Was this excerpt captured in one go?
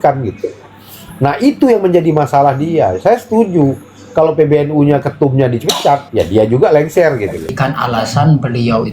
no; 1 cut; at 7.5 s

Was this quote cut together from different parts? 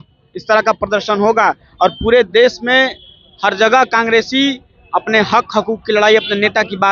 no; 0 cuts

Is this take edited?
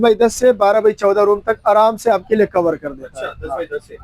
no; 0 cuts

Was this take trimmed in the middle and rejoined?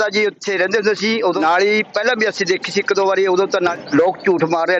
yes; 2 cuts; at 1.4 s, 3.8 s

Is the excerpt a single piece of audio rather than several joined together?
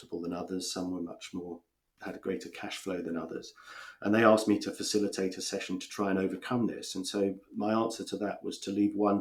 yes; 0 cuts

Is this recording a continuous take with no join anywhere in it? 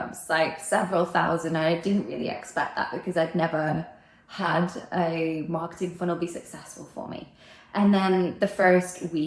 yes; 0 cuts

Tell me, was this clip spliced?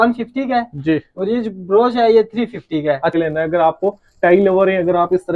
yes; 1 cut; at 3.1 s

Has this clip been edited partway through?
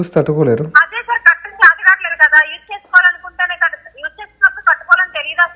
no; 0 cuts

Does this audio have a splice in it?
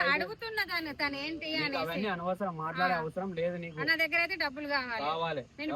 no; 0 cuts

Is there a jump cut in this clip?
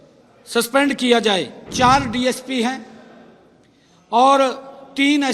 yes; 1 cut; at 1.6 s

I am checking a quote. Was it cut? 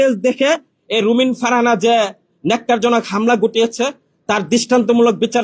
no; 0 cuts

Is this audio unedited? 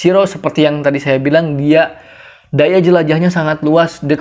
yes; 0 cuts

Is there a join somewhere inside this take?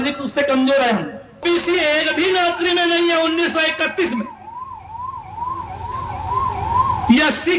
yes; 1 cut; at 1.4 s

